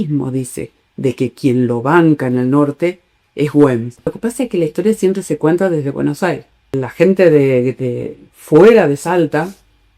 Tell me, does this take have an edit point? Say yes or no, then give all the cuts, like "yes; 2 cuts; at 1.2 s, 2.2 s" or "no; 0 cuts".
yes; 2 cuts; at 4.2 s, 6.8 s